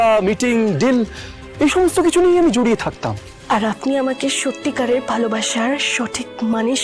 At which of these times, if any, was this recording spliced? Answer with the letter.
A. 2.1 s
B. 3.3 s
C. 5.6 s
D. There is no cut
B